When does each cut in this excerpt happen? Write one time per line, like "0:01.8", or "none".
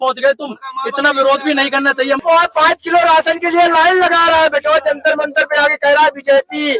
0:02.2

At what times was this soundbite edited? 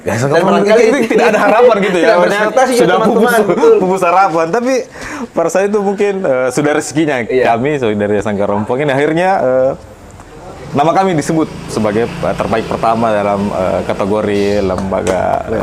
none

